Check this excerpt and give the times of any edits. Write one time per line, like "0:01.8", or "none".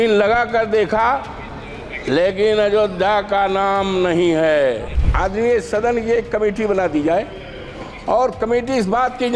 0:05.0